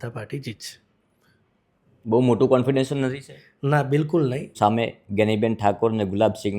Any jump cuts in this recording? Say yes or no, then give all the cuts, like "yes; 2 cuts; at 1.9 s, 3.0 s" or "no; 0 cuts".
yes; 1 cut; at 4.5 s